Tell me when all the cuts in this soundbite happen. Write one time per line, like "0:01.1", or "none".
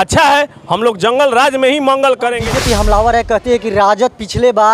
0:02.4